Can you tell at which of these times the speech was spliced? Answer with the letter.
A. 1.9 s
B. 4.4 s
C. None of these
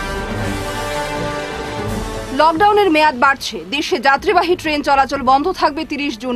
A